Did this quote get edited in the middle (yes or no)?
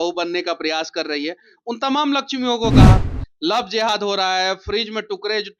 no